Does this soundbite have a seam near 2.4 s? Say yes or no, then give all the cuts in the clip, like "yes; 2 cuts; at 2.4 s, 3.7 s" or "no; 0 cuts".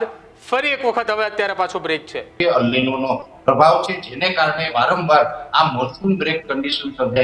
yes; 1 cut; at 2.4 s